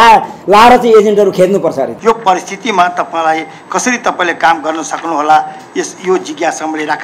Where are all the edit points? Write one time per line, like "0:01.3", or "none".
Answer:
0:01.9